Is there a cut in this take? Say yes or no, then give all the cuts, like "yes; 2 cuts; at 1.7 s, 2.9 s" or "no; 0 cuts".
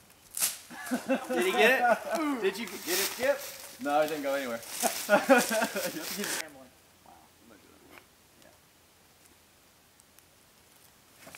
no; 0 cuts